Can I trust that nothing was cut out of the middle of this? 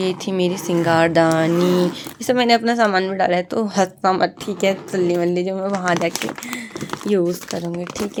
yes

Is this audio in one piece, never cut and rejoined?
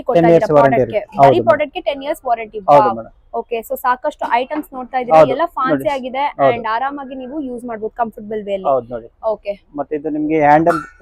yes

